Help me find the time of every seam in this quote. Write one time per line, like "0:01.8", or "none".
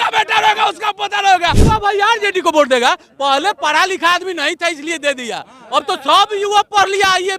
0:01.6